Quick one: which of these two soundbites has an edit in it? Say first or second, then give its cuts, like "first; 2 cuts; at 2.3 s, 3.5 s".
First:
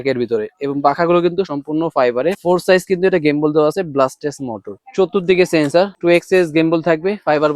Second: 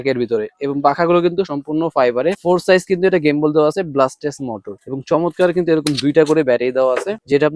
first; 1 cut; at 4.8 s